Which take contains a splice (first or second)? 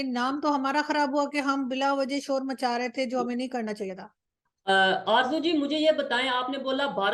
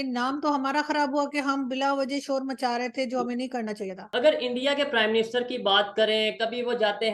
second